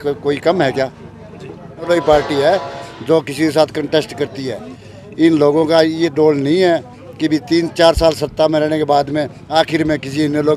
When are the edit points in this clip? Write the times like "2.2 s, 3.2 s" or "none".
1.9 s